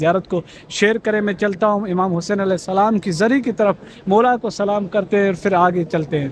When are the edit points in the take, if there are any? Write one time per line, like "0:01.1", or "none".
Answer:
none